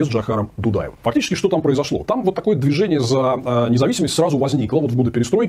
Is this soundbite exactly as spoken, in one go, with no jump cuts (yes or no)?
yes